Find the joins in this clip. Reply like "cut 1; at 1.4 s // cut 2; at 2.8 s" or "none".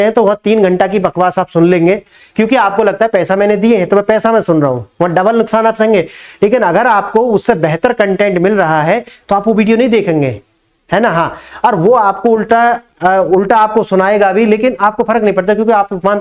none